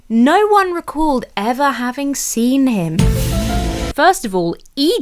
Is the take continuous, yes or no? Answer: no